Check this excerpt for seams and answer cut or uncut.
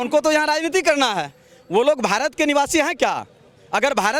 uncut